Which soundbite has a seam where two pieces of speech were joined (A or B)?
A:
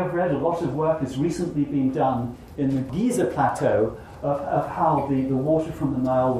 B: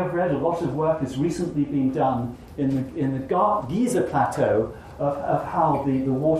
A